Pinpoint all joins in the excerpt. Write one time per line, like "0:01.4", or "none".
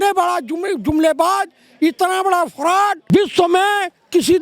0:03.1